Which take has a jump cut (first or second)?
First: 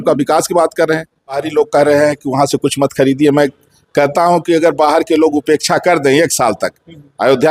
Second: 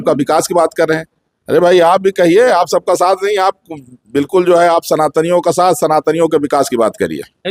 first